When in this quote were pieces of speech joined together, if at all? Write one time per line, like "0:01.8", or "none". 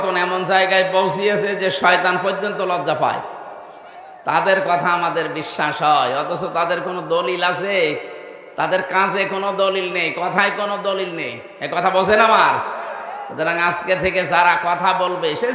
none